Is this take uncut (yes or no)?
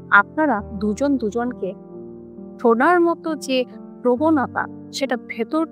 yes